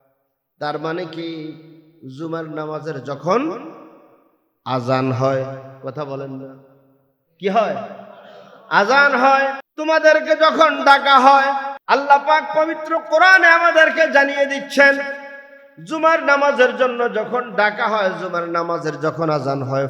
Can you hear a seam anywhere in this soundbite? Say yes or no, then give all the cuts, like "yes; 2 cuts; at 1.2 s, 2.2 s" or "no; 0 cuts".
yes; 2 cuts; at 9.7 s, 11.7 s